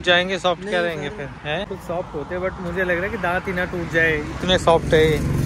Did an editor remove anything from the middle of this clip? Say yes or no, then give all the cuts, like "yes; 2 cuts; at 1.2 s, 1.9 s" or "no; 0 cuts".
yes; 1 cut; at 1.7 s